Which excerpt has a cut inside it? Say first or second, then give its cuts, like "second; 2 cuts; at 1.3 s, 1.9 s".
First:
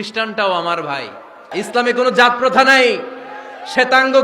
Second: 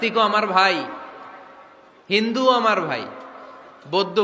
first; 1 cut; at 1.5 s